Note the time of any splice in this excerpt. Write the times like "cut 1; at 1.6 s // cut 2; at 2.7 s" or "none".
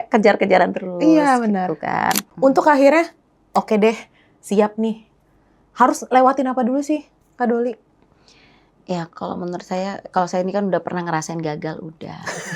cut 1; at 2.3 s